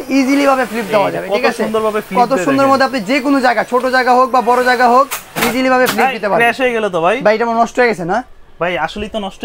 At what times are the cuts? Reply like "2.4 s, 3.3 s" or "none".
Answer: none